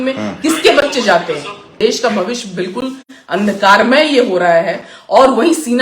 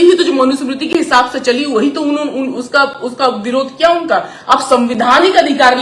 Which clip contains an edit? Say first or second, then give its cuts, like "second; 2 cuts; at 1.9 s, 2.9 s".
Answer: first; 1 cut; at 1.8 s